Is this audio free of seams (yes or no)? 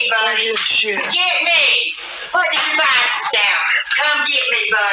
yes